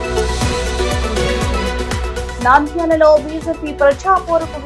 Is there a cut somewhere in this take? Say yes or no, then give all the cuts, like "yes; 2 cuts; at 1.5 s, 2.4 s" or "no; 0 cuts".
yes; 1 cut; at 2.3 s